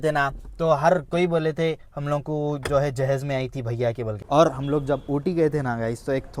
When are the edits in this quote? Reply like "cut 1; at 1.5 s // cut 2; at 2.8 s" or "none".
cut 1; at 4.2 s